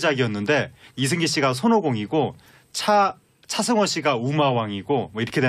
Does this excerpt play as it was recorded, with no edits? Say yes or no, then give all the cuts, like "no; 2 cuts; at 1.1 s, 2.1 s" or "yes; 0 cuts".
no; 1 cut; at 4.3 s